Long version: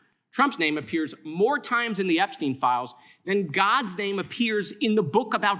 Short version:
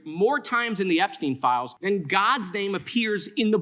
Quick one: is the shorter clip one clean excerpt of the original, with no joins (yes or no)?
no